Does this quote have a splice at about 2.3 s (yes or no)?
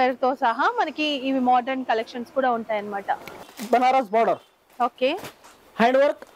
no